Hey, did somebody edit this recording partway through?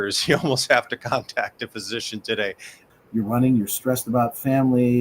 yes; 1 cut; at 2.9 s

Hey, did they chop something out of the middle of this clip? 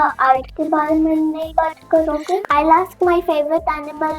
yes; 1 cut; at 2.4 s

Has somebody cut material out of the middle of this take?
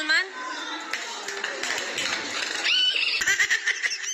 yes; 1 cut; at 3.2 s

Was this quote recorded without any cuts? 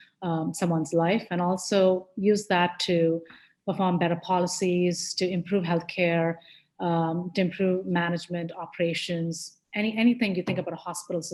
yes; 0 cuts

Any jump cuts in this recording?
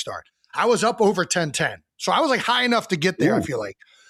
no; 0 cuts

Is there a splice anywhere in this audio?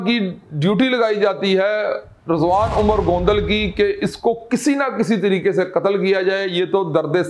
no; 0 cuts

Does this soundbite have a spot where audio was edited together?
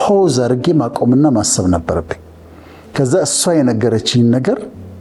no; 0 cuts

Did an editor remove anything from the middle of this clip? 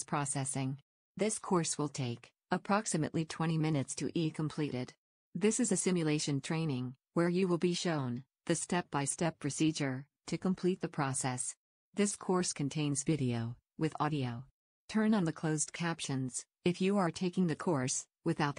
yes; 1 cut; at 0.9 s

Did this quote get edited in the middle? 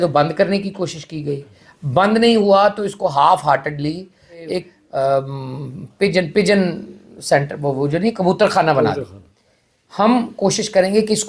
yes; 1 cut; at 4.8 s

